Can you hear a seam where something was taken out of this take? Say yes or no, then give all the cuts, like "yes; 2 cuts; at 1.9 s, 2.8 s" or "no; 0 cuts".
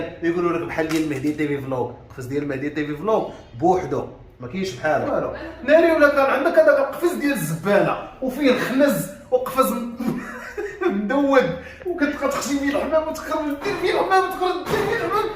yes; 1 cut; at 5.1 s